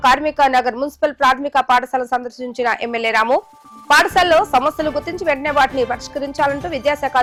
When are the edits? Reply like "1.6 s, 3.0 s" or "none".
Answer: none